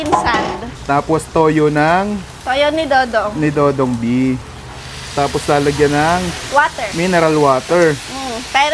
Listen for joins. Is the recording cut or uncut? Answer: uncut